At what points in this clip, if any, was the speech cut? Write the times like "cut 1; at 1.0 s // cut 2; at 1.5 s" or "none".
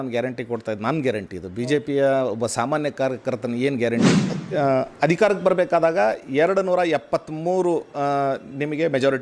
cut 1; at 4.1 s